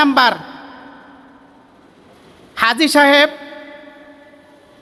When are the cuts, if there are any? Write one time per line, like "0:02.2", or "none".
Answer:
none

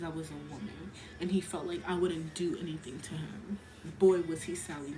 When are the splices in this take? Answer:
none

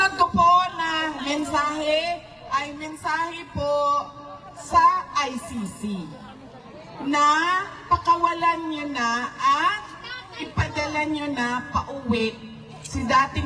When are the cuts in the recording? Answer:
none

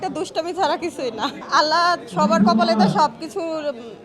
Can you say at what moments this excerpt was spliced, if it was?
none

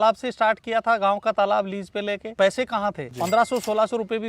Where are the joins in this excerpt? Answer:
0:02.3

